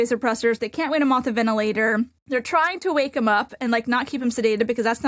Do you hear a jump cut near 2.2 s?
yes; 1 cut; at 2.2 s

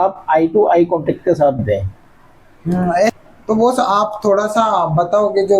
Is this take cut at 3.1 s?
yes; 1 cut; at 3.1 s

